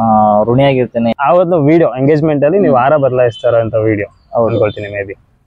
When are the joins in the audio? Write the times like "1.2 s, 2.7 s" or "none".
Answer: 1.1 s